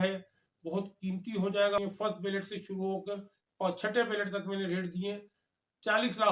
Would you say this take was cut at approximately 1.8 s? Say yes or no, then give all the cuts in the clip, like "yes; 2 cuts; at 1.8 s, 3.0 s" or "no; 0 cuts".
yes; 1 cut; at 1.8 s